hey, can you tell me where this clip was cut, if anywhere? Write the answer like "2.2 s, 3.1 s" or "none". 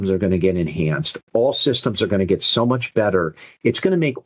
none